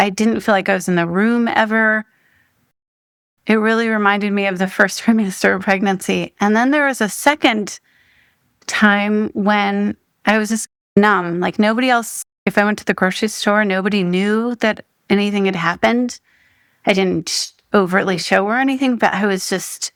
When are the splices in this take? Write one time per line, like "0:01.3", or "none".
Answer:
none